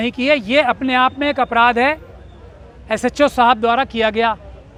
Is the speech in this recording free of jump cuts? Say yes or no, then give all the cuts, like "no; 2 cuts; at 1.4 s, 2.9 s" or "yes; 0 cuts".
yes; 0 cuts